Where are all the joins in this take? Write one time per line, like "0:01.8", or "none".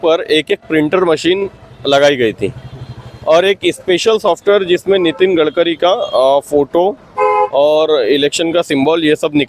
none